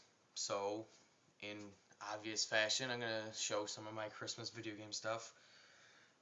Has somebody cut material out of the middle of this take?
yes; 1 cut; at 1.1 s

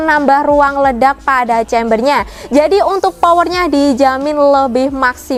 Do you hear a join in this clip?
no; 0 cuts

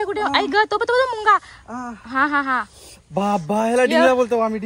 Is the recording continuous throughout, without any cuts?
yes; 0 cuts

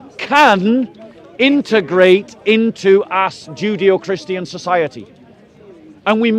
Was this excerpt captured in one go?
yes; 0 cuts

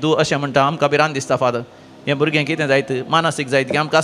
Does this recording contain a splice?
no; 0 cuts

